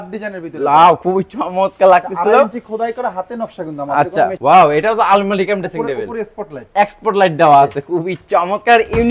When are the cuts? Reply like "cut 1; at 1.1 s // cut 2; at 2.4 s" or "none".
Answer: cut 1; at 4.4 s